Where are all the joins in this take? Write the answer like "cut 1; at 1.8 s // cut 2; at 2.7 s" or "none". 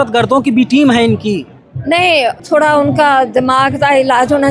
cut 1; at 2.4 s